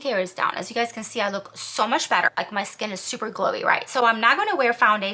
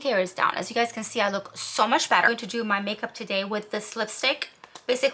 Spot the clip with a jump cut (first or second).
second